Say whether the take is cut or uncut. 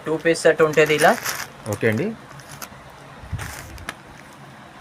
uncut